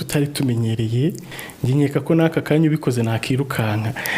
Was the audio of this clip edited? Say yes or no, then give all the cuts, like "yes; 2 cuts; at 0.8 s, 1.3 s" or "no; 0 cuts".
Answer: yes; 1 cut; at 1.3 s